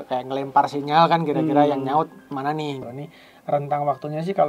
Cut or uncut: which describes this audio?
cut